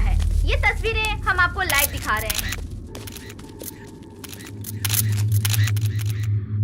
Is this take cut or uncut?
uncut